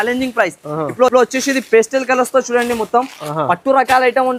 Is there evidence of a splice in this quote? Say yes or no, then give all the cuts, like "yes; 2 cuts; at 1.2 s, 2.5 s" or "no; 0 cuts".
no; 0 cuts